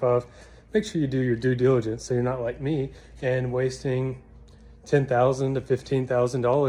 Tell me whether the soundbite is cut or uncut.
uncut